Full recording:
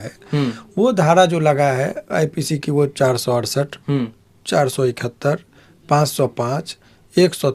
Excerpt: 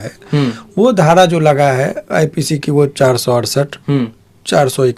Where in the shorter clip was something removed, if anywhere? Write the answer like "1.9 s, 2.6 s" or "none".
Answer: none

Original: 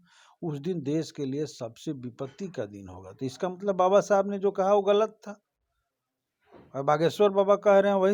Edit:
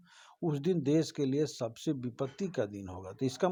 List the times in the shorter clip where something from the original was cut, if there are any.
none

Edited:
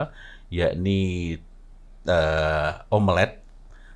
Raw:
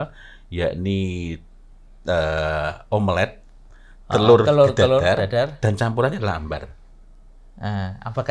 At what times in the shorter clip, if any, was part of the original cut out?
none

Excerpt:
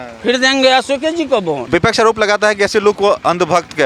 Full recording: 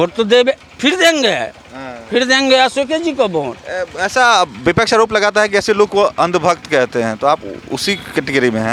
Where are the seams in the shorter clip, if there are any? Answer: 1.6 s

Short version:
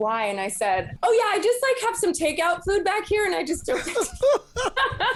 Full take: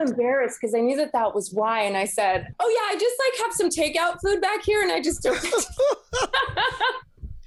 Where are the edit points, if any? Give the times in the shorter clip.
none

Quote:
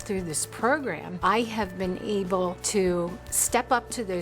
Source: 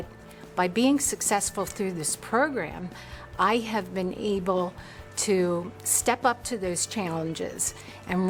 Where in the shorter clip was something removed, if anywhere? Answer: 1.1 s, 2.6 s

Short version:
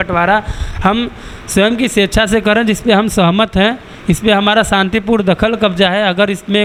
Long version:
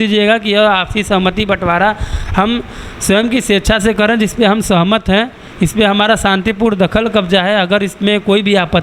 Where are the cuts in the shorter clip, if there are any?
none

